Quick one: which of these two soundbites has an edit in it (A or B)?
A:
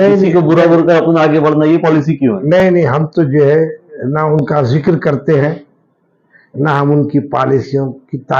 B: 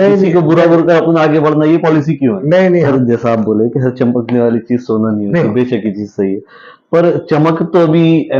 B